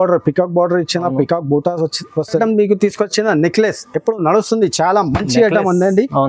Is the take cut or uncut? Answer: cut